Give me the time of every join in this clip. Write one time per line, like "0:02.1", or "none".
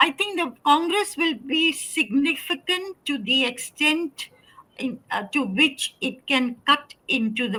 none